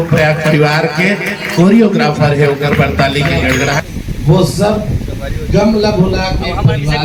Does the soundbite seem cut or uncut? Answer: uncut